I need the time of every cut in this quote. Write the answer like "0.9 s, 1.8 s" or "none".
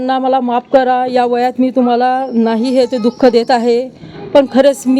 none